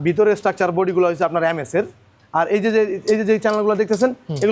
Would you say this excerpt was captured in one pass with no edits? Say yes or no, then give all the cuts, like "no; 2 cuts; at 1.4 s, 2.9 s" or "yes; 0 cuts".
yes; 0 cuts